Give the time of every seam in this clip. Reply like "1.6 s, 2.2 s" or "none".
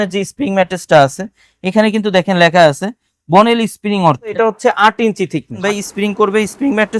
4.3 s, 5.6 s